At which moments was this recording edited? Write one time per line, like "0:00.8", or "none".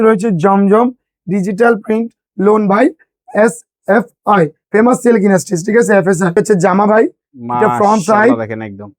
0:06.4